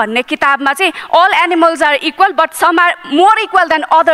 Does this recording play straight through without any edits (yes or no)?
yes